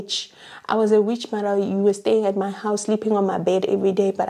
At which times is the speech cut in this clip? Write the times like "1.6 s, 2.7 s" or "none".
none